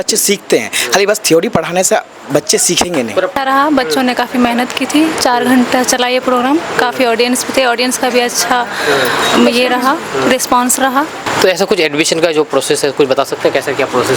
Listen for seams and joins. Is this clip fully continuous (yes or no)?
no